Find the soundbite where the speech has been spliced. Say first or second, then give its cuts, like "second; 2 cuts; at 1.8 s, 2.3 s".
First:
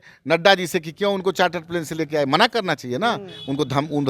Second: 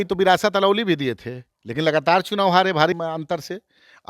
second; 1 cut; at 2.9 s